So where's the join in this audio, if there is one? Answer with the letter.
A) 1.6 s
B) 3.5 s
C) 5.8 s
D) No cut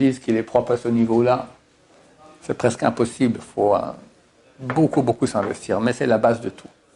D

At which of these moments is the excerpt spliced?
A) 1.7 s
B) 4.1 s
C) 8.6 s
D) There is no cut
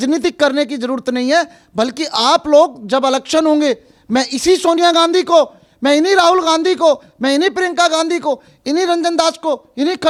D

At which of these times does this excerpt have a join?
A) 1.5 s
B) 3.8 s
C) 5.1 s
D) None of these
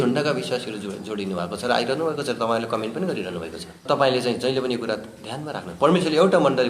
B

